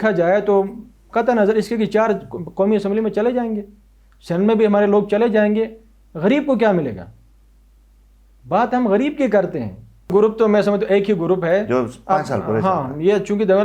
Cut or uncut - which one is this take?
cut